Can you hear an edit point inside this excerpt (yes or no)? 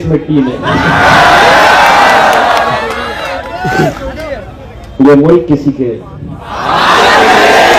no